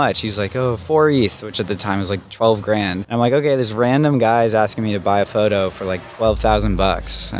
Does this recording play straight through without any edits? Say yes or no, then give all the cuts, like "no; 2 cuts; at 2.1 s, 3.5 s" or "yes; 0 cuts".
no; 1 cut; at 3.0 s